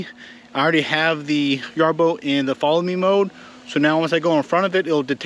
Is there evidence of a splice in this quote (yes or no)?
no